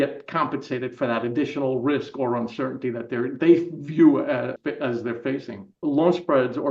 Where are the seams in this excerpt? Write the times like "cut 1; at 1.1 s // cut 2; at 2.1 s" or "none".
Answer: cut 1; at 4.5 s // cut 2; at 5.8 s